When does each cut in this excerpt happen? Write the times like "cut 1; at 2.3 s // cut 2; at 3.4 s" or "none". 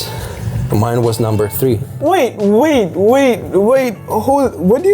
cut 1; at 1.9 s